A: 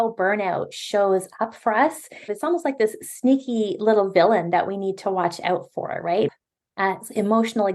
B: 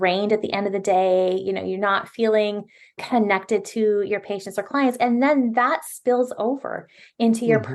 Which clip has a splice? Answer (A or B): A